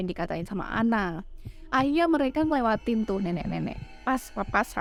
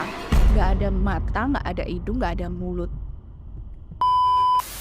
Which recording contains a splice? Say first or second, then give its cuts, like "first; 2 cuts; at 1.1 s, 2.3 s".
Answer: second; 1 cut; at 3.8 s